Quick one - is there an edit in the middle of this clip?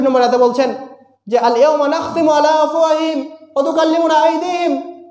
no; 0 cuts

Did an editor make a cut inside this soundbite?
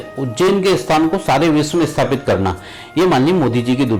no; 0 cuts

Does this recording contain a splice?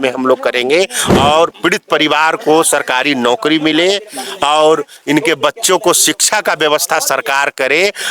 yes; 1 cut; at 1.0 s

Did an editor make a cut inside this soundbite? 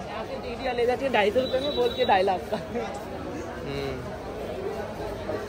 no; 0 cuts

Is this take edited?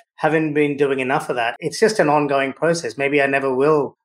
yes; 1 cut; at 1.5 s

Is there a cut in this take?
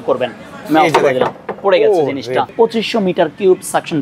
yes; 1 cut; at 2.5 s

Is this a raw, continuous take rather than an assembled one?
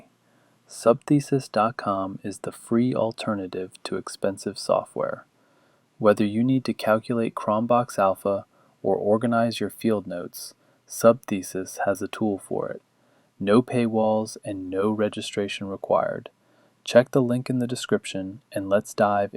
no; 1 cut; at 18.1 s

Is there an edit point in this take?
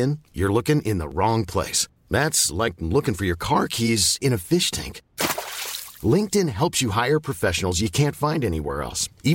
no; 0 cuts

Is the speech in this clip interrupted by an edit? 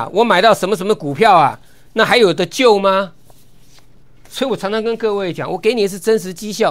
no; 0 cuts

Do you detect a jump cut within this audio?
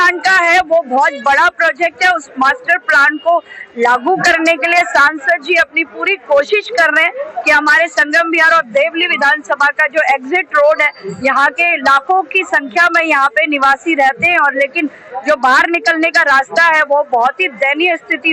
no; 0 cuts

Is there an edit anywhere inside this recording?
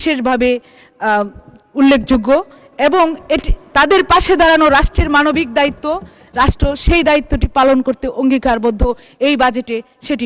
no; 0 cuts

